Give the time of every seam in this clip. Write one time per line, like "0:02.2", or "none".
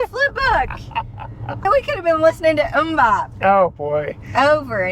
0:01.6